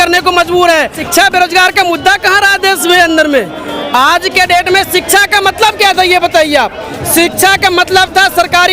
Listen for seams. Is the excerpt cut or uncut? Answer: cut